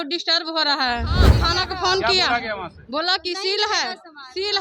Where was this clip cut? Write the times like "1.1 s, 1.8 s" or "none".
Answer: 1.3 s